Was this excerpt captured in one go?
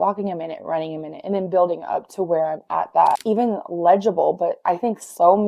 no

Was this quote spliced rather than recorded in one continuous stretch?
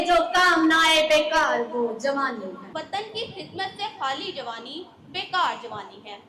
yes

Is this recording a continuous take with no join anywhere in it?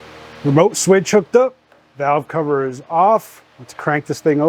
yes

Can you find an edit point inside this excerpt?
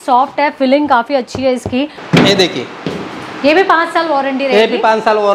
yes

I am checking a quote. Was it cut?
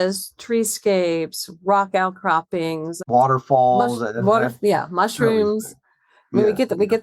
yes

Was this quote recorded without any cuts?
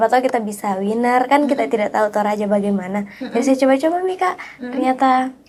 yes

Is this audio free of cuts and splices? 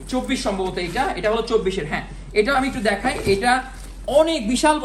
yes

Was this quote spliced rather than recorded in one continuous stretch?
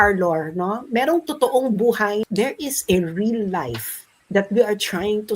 yes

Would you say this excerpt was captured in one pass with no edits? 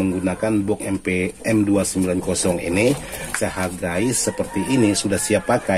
yes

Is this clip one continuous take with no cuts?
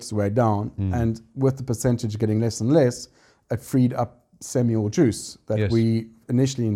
yes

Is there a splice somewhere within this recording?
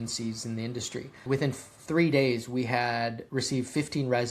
yes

